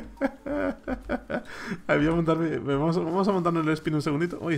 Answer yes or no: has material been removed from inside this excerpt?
no